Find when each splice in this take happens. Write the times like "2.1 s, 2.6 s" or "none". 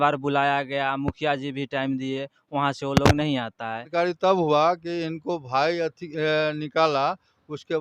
3.9 s

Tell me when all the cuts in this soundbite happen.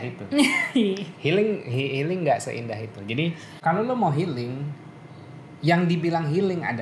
3.5 s

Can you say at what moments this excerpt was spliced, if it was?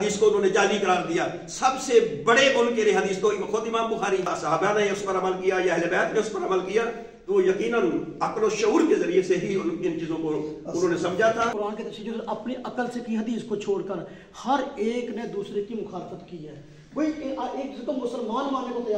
4.3 s, 11.5 s

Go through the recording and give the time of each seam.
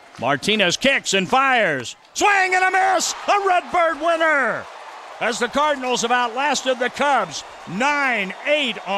none

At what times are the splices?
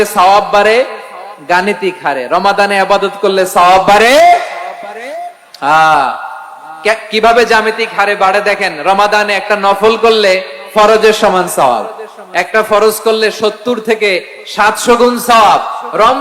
none

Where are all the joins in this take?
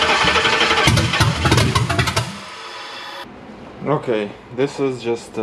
3.2 s

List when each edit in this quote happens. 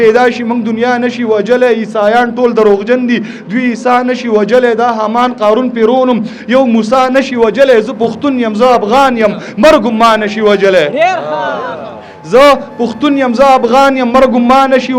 none

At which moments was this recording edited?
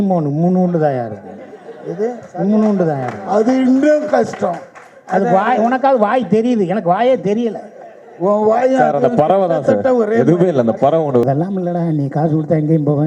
11.2 s

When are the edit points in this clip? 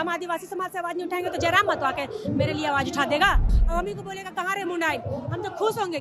3.5 s

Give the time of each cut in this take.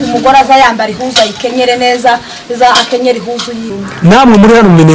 3.7 s

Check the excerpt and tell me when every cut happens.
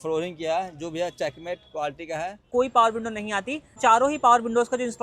2.4 s, 3.7 s

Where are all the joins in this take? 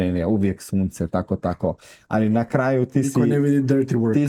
none

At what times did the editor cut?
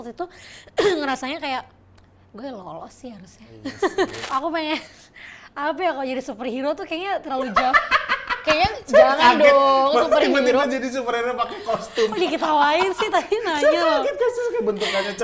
4.2 s

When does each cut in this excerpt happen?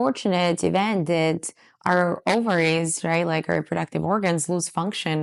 none

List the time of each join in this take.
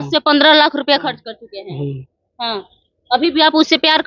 none

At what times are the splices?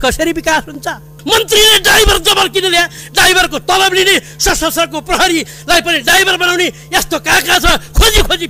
1.1 s

